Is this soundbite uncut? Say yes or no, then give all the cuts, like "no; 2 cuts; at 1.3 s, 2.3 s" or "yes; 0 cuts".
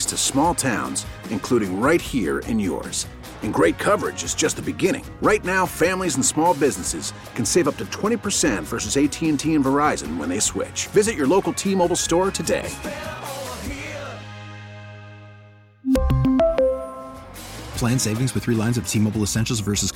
yes; 0 cuts